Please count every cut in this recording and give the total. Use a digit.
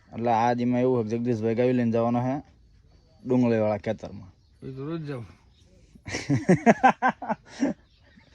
0